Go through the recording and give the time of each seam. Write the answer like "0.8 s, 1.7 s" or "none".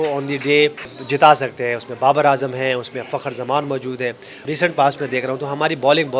0.9 s, 4.4 s